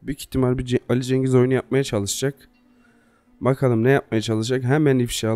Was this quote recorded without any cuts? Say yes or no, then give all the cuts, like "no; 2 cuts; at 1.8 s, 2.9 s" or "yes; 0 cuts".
yes; 0 cuts